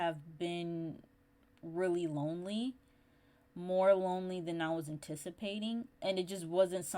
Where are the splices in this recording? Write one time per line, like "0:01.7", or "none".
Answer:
none